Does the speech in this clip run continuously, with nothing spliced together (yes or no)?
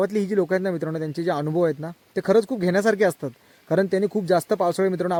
yes